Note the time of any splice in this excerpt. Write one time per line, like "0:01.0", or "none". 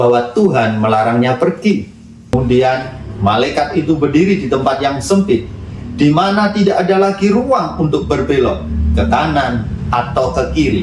0:02.3